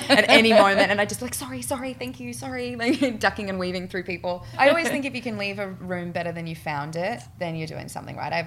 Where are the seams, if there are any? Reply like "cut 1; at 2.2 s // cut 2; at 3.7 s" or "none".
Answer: cut 1; at 4.6 s // cut 2; at 7.3 s